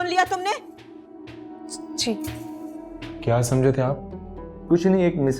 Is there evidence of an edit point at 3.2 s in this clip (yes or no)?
yes